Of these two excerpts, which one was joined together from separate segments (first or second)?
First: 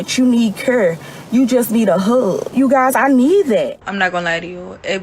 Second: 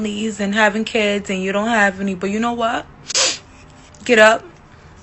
first